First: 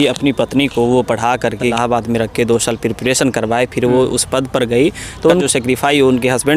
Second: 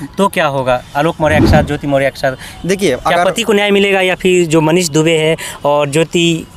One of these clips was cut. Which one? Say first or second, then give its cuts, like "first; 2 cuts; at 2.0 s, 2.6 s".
first; 2 cuts; at 1.7 s, 5.4 s